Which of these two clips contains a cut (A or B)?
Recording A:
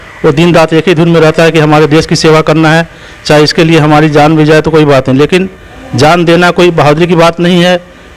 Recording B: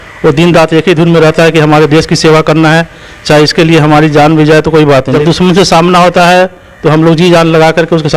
B